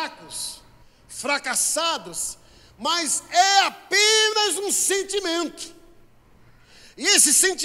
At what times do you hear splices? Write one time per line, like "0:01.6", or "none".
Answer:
none